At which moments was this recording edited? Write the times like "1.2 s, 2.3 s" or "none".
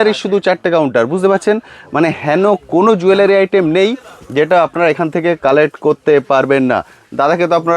none